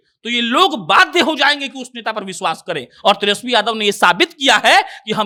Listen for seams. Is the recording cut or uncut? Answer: uncut